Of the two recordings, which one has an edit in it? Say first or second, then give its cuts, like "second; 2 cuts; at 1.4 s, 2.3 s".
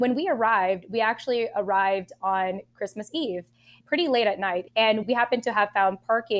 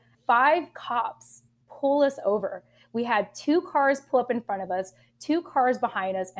first; 1 cut; at 4.6 s